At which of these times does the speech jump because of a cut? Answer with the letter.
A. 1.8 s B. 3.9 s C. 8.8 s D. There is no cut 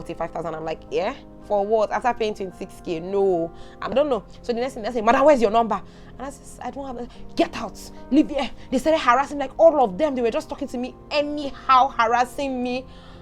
B